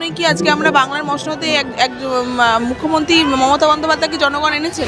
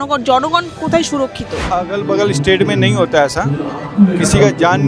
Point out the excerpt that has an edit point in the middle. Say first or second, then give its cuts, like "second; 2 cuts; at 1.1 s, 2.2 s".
second; 1 cut; at 1.7 s